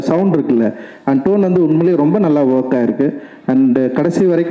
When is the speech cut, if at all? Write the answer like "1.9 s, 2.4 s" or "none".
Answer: none